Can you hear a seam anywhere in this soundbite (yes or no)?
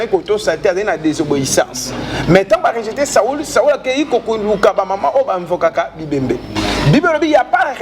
no